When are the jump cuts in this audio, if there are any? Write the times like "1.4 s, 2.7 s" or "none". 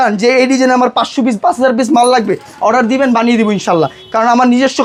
none

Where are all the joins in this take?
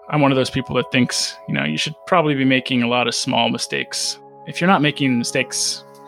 none

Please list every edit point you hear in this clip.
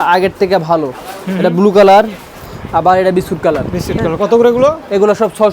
none

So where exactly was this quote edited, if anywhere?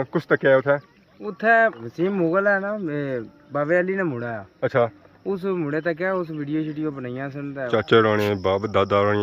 1.8 s, 7.7 s

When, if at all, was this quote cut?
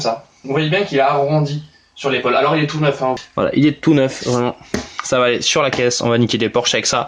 3.2 s

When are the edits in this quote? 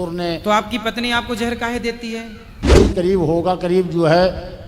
2.8 s

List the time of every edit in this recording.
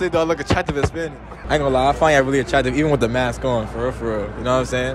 1.3 s

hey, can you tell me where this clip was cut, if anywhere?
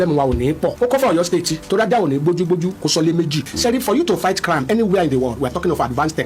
0.7 s, 1.6 s, 3.5 s

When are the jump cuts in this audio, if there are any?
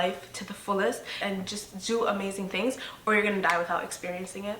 1.2 s

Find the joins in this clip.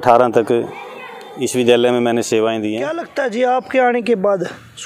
3.1 s

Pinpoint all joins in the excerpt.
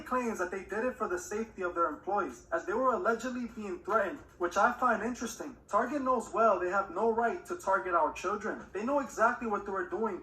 5.5 s

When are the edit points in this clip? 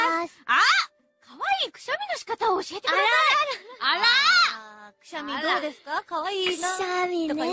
none

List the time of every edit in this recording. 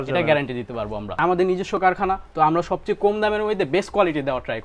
1.2 s

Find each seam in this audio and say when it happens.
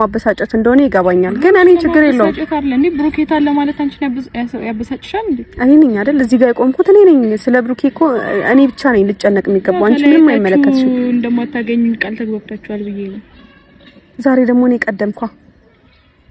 none

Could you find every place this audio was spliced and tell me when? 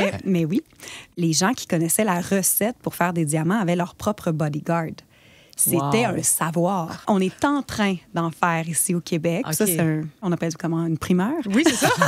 1.1 s, 7.0 s, 10.2 s

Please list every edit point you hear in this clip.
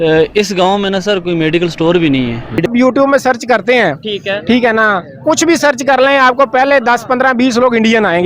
2.7 s

